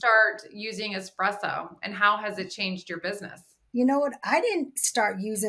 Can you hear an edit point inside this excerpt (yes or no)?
no